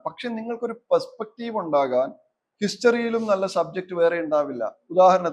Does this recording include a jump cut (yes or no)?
no